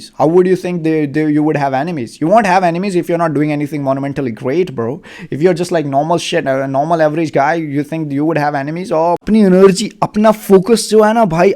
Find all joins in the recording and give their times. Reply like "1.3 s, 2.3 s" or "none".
9.2 s